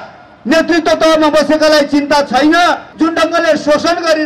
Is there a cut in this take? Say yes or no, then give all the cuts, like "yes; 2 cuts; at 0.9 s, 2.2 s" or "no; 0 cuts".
yes; 1 cut; at 2.9 s